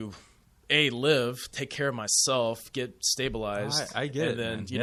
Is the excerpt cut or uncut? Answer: uncut